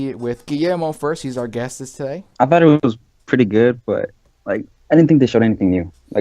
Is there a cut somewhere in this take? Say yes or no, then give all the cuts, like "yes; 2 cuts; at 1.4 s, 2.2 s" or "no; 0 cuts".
yes; 1 cut; at 2.2 s